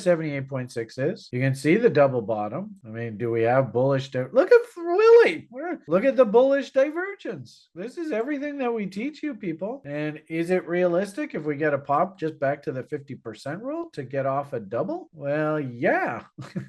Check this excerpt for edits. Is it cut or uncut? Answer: uncut